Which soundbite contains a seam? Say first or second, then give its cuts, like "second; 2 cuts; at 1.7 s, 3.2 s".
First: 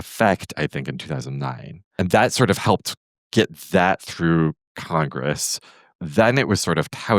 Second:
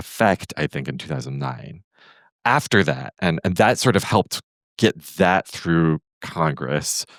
first; 2 cuts; at 1.9 s, 6.0 s